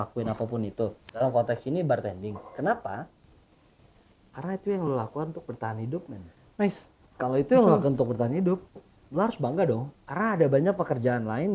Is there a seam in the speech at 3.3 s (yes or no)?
no